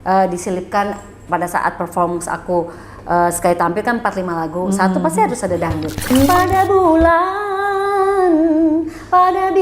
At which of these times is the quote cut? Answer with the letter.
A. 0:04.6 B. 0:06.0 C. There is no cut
B